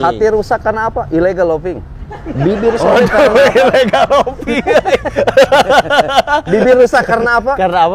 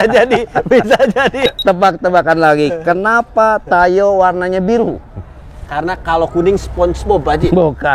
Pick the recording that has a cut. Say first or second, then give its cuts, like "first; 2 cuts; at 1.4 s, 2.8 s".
second; 1 cut; at 1.5 s